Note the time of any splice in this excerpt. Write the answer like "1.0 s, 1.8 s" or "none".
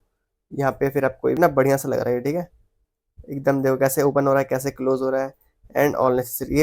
1.4 s